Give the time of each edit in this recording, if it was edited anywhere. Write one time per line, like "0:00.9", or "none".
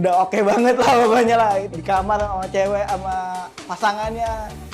0:01.6